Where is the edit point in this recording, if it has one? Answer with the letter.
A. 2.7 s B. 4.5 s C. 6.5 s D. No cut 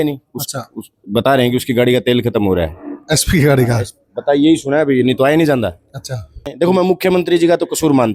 C